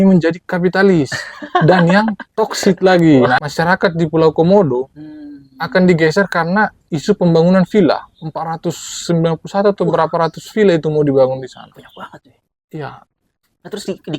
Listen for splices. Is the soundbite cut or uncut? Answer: cut